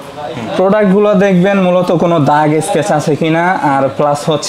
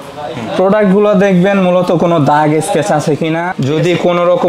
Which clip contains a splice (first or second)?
second